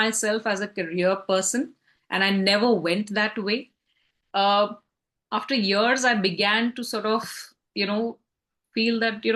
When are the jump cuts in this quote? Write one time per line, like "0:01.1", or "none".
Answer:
none